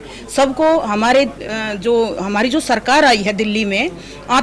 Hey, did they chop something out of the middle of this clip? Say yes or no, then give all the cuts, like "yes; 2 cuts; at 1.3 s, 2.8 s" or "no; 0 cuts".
no; 0 cuts